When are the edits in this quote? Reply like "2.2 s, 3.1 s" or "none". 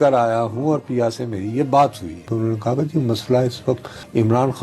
2.3 s